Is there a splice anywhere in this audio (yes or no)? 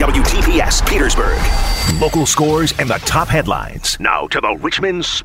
yes